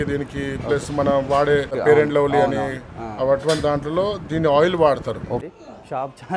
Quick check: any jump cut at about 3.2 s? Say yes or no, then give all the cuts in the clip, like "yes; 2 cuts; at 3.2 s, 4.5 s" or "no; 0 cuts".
no; 2 cuts; at 1.8 s, 5.4 s